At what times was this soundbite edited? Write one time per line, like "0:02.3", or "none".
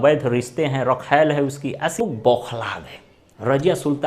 0:02.0